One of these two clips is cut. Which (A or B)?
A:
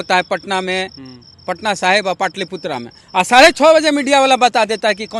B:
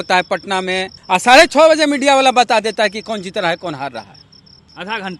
B